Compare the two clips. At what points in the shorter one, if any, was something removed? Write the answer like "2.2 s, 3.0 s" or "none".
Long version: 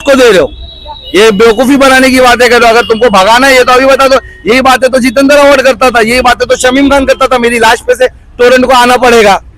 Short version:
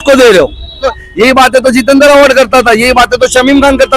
1.0 s